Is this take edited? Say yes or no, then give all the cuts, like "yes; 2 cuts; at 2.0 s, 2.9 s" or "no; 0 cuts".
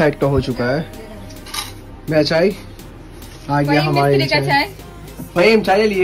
no; 0 cuts